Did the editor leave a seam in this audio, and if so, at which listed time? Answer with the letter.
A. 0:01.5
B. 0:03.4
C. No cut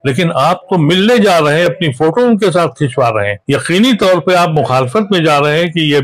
B